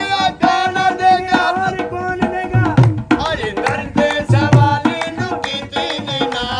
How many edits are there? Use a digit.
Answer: 0